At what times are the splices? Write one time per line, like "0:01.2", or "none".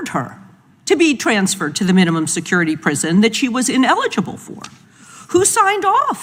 none